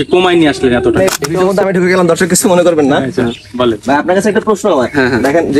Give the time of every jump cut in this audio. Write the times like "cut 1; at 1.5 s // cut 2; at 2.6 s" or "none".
cut 1; at 1.0 s